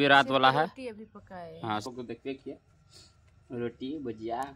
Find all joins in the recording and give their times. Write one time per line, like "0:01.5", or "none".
0:01.8

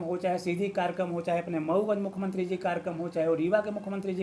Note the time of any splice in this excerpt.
none

